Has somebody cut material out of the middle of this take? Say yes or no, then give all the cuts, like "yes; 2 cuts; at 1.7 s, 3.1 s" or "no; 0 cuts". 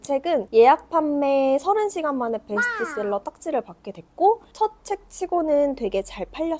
no; 0 cuts